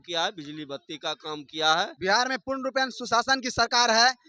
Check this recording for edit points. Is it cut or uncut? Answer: cut